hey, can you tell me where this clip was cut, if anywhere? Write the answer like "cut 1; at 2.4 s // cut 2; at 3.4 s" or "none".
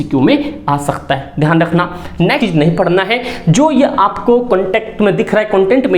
cut 1; at 2.4 s